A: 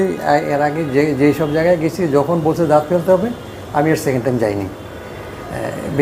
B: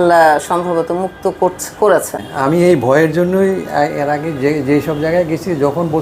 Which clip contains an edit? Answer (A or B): B